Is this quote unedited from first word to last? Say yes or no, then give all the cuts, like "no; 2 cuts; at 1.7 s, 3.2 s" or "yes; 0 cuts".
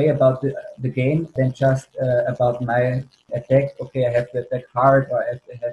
no; 2 cuts; at 1.3 s, 3.2 s